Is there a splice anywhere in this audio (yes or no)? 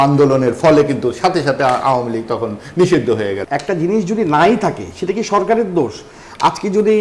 yes